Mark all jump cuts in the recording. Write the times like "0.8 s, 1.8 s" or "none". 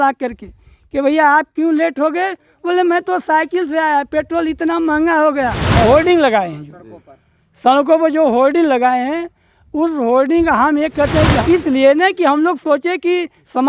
5.8 s, 11.4 s